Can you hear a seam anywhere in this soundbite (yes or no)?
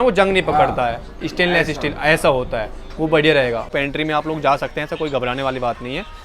yes